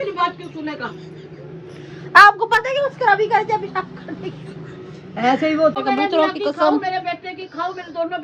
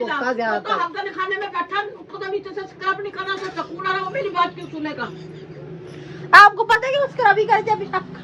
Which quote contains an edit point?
first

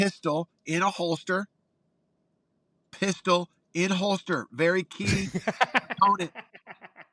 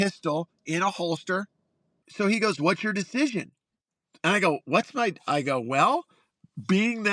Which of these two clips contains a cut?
second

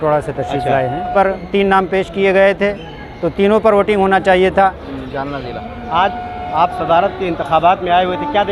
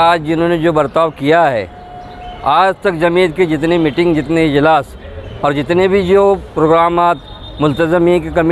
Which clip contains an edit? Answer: first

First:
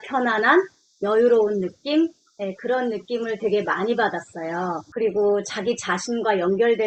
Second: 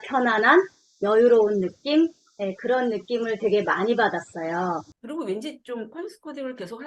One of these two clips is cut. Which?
second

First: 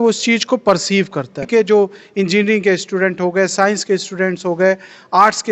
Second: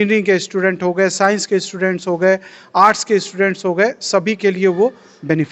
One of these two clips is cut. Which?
first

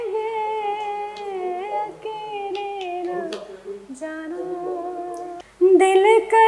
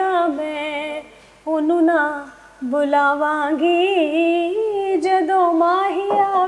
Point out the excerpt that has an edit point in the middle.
first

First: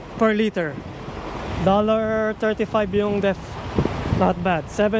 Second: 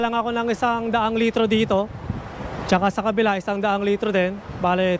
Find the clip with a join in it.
first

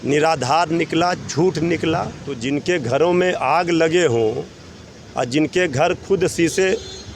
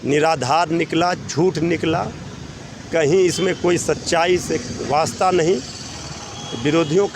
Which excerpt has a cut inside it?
first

